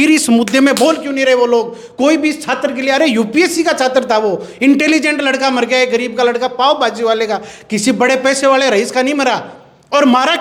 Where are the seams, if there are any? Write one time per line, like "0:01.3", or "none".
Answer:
none